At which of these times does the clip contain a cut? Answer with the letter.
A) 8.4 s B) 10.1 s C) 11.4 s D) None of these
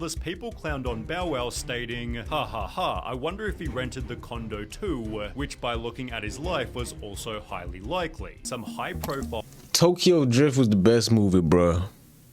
A